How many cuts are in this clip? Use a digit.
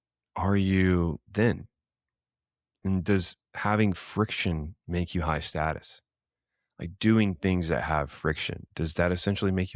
0